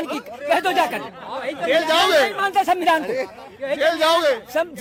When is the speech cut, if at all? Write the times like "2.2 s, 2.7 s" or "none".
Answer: none